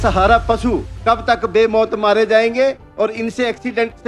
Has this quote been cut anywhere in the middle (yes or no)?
yes